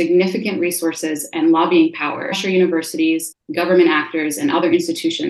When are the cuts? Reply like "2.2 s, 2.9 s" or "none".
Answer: 2.4 s, 3.4 s